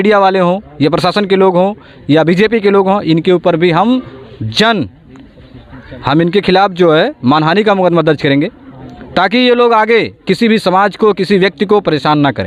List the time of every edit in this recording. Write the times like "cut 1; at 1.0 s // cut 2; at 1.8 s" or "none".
none